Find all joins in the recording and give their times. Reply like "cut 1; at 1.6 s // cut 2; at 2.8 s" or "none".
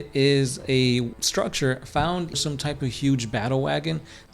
cut 1; at 1.2 s // cut 2; at 2.4 s